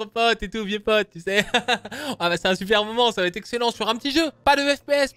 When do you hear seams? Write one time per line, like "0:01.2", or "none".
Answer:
none